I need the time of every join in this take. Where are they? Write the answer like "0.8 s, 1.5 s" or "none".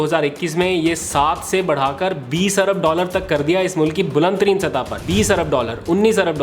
5.0 s